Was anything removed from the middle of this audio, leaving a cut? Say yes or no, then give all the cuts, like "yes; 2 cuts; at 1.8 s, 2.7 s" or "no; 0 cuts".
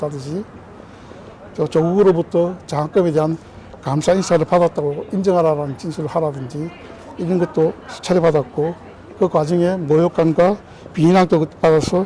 no; 0 cuts